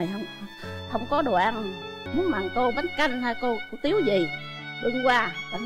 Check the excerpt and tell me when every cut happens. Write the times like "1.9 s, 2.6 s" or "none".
2.0 s